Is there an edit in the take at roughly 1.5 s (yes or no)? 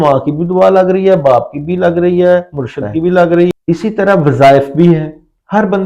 no